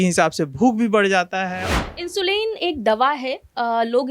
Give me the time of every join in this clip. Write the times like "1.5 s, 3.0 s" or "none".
1.6 s